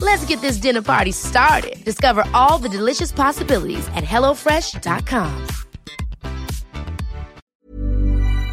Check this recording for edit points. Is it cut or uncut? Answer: cut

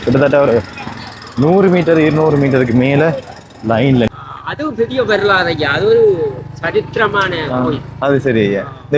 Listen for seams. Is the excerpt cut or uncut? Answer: cut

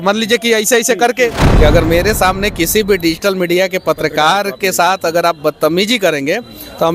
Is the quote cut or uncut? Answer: cut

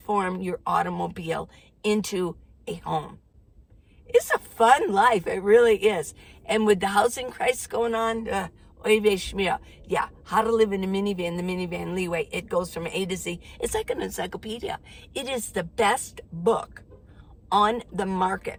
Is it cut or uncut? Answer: uncut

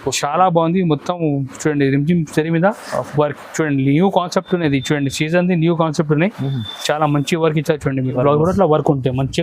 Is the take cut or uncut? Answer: cut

